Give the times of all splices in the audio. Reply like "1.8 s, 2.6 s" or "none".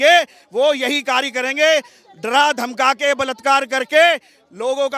none